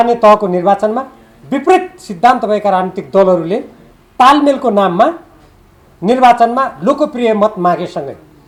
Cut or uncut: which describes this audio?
uncut